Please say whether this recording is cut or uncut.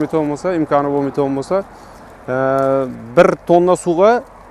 uncut